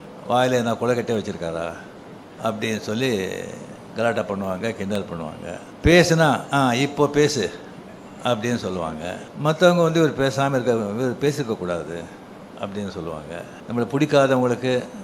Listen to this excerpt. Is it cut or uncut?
cut